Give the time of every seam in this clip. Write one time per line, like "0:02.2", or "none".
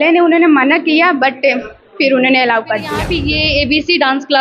0:03.1